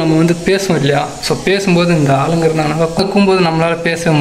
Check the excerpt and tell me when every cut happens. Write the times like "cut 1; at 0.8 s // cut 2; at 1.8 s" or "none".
cut 1; at 3.0 s